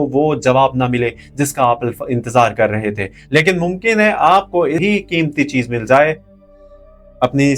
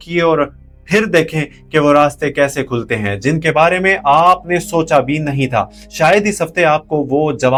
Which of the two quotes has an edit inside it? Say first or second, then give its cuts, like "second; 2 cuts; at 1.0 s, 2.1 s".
first; 1 cut; at 4.8 s